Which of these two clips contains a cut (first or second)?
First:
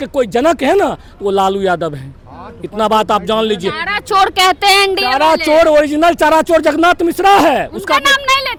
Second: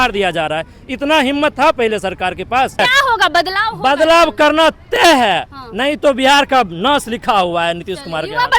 second